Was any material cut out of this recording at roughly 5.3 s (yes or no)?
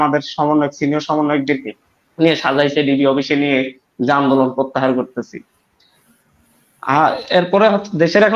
no